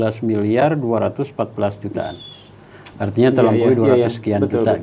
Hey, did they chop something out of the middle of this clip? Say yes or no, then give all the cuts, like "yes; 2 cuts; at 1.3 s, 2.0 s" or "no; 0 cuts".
no; 0 cuts